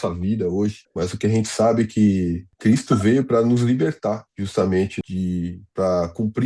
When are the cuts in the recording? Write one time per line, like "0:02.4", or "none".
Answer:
0:00.8
0:02.5
0:04.3
0:04.9